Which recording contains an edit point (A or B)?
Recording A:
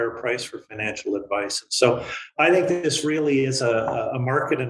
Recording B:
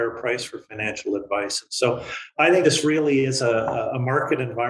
B